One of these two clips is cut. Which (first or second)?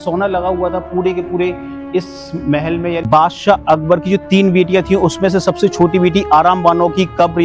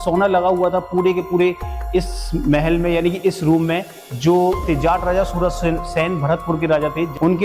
first